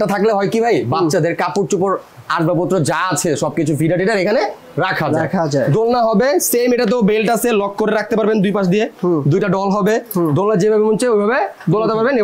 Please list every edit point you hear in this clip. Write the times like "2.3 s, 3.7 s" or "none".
none